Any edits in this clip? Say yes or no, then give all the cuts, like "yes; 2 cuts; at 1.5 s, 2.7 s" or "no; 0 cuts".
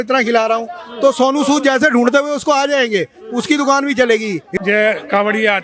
yes; 1 cut; at 4.5 s